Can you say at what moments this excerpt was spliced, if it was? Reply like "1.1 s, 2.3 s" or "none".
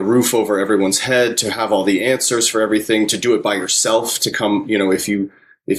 none